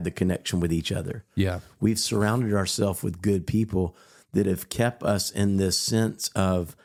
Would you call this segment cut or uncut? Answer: uncut